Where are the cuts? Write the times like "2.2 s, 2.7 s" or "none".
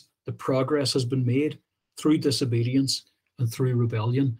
none